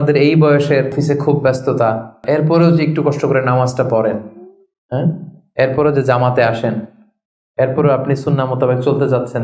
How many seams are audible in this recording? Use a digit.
2